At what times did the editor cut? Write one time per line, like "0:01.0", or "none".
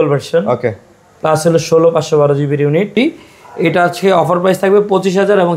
0:02.9